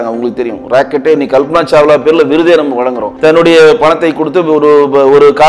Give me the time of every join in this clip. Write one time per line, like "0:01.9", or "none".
0:03.1